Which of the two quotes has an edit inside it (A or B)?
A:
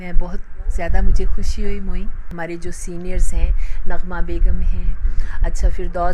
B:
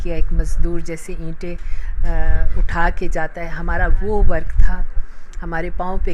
A